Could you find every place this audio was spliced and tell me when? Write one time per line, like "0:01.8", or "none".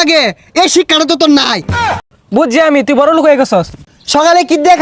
0:02.0
0:03.8